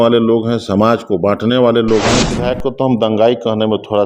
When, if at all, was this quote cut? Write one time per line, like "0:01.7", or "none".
0:02.4

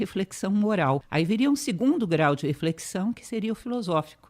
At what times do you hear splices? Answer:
0:01.1

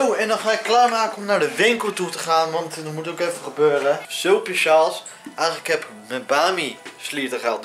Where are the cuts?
0:04.1

